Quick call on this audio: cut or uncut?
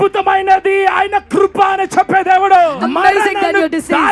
cut